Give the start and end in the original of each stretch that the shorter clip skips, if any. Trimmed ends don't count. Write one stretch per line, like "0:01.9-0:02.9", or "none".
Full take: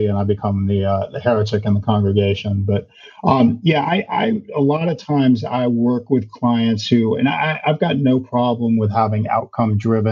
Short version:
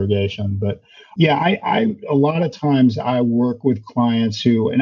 0:03.2-0:03.6